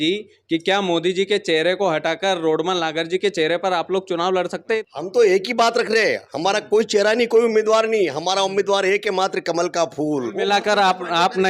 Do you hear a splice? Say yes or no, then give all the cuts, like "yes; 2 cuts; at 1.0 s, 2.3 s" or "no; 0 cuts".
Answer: yes; 2 cuts; at 4.9 s, 10.3 s